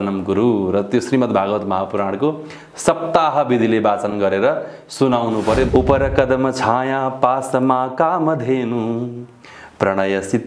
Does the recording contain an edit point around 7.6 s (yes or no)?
no